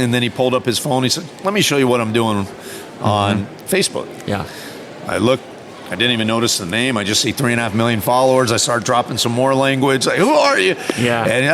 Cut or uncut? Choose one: uncut